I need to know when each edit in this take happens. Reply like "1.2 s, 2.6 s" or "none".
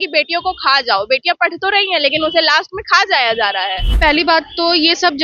3.8 s